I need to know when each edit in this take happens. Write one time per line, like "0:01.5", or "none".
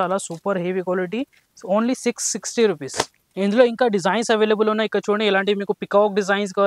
none